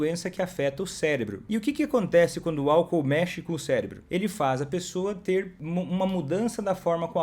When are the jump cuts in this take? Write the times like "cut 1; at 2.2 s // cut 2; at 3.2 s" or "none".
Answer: cut 1; at 1.4 s // cut 2; at 4.0 s // cut 3; at 5.6 s